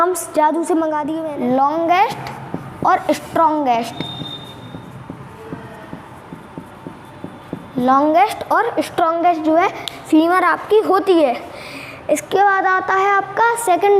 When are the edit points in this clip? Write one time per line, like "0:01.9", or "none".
0:01.1